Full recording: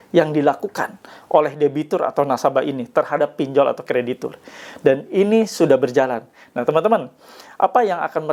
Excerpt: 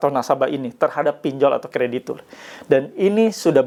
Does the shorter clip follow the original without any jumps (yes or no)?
yes